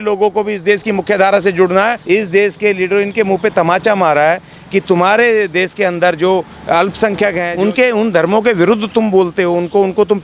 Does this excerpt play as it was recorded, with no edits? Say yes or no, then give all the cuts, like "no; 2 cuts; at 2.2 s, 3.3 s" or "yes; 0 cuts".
no; 2 cuts; at 2.0 s, 7.4 s